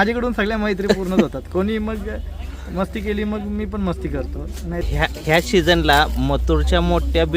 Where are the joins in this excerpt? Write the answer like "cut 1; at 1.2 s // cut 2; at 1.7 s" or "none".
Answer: cut 1; at 4.9 s